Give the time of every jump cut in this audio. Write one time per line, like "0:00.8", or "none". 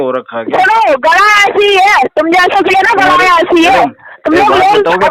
none